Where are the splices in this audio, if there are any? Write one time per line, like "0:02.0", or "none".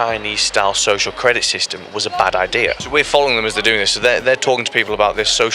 0:02.8